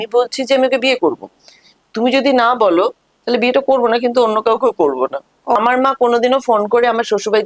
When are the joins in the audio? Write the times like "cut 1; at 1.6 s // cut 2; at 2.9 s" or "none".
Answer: cut 1; at 5.6 s

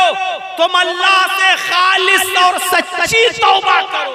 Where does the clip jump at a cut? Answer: none

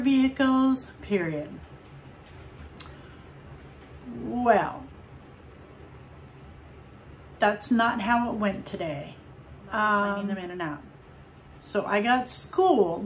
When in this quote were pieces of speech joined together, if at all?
cut 1; at 10.4 s

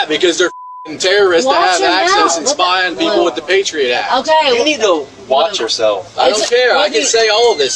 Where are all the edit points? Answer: none

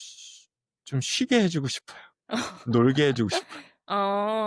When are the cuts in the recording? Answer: none

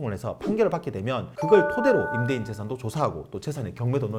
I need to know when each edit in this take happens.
none

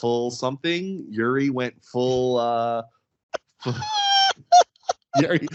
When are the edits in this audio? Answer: none

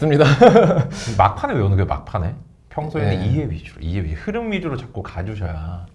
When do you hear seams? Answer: none

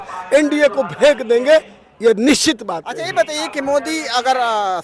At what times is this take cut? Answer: none

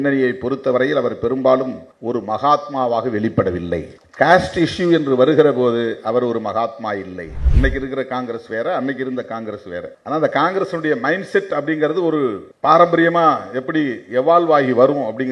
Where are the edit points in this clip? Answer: cut 1; at 7.4 s

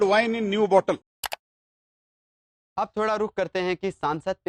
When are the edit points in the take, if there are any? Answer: none

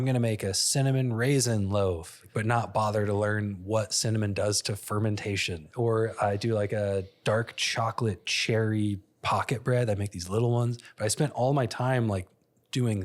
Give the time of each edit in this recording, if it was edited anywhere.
cut 1; at 2.2 s // cut 2; at 5.6 s

